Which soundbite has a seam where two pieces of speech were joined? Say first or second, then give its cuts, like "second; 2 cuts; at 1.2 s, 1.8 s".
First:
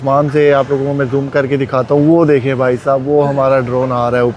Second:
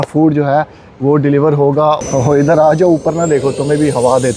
second; 1 cut; at 2.0 s